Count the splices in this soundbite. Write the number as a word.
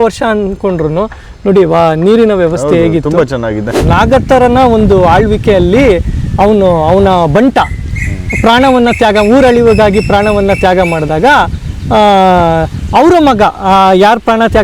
one